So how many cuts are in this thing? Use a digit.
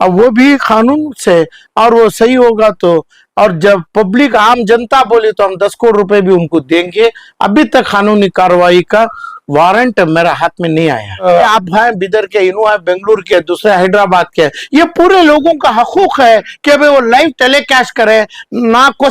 1